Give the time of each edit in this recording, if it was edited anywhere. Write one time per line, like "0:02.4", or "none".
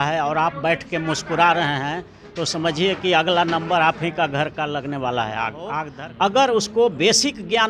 0:05.8